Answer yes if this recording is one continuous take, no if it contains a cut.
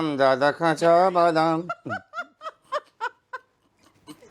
yes